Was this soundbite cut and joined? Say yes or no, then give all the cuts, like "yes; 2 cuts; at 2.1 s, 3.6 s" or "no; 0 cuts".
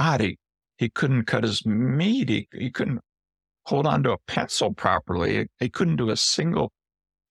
no; 0 cuts